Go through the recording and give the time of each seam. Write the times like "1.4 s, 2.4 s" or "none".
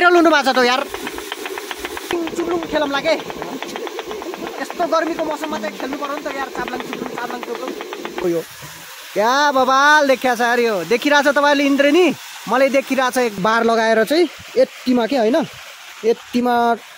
2.1 s, 8.2 s, 13.4 s